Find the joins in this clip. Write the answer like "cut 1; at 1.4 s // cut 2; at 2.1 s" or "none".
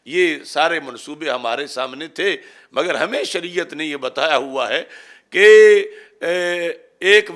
none

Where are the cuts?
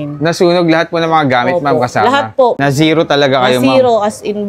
cut 1; at 2.6 s

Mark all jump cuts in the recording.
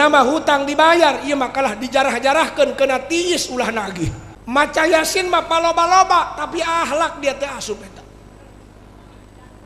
cut 1; at 4.3 s

